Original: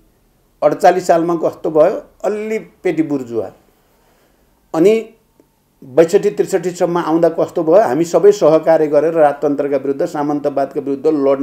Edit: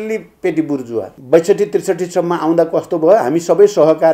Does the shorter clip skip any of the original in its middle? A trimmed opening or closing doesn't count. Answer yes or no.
yes